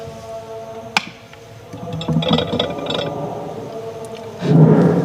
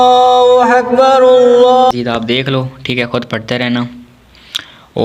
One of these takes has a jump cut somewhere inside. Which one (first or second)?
second